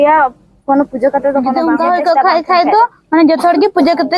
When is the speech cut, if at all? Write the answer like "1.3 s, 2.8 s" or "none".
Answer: 1.6 s